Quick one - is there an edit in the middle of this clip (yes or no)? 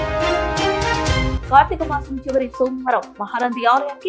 yes